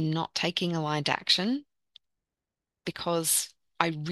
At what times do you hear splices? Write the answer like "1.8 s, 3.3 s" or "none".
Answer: none